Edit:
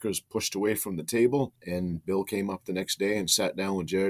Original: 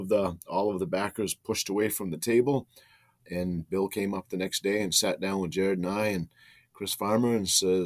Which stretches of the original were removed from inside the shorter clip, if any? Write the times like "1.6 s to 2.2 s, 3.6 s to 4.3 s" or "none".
2.7 s to 3.2 s